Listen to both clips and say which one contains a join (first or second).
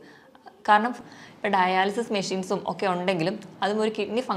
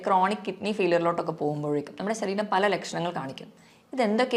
first